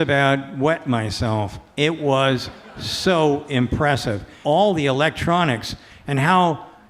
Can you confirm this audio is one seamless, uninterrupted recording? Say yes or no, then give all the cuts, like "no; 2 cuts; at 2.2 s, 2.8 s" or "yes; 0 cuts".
no; 1 cut; at 4.3 s